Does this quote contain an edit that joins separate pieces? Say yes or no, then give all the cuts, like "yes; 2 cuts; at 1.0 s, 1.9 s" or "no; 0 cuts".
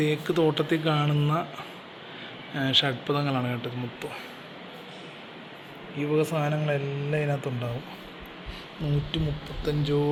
no; 0 cuts